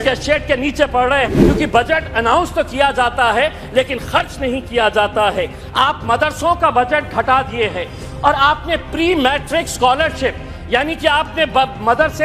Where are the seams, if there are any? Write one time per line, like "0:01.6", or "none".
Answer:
0:01.4